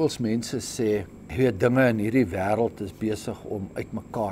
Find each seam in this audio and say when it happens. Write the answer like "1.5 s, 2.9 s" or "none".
1.2 s